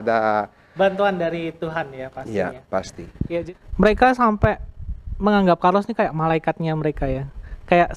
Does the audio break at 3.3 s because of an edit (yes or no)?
yes